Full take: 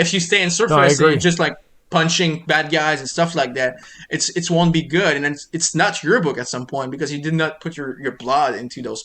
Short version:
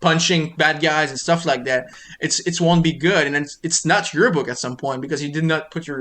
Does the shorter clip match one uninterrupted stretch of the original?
yes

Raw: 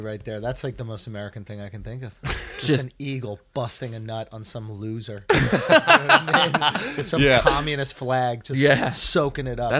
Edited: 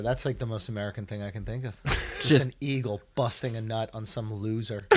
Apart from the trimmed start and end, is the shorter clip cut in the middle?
no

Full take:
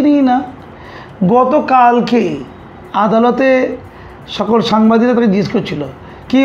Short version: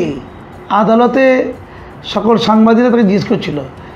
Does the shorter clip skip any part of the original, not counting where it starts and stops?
no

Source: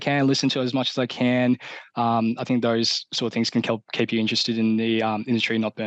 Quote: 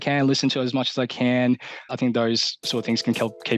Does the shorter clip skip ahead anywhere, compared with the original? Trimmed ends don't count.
yes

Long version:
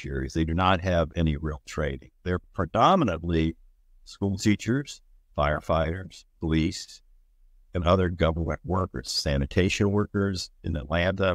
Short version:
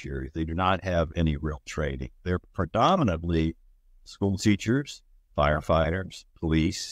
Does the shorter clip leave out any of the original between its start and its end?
no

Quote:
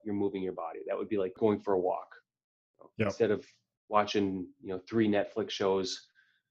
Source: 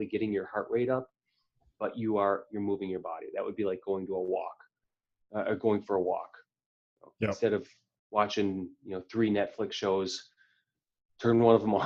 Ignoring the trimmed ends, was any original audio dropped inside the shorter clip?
yes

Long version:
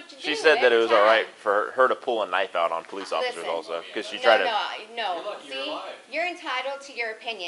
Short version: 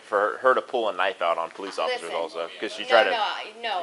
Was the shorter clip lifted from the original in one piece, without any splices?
yes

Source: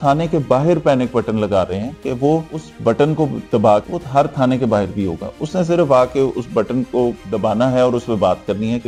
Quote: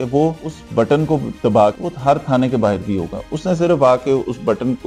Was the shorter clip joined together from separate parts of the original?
no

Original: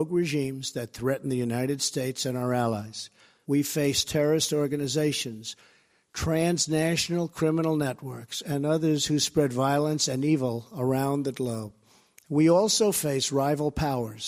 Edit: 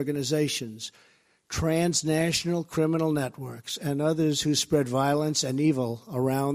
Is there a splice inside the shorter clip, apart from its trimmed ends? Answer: no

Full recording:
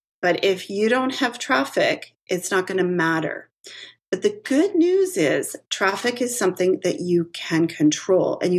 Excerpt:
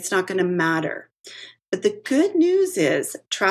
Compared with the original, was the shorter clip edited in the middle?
no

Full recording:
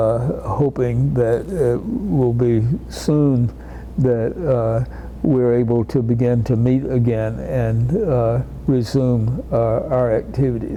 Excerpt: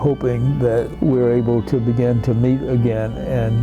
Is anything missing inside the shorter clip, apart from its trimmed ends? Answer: yes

